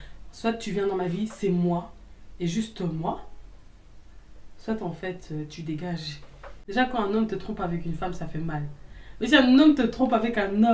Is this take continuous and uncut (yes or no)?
no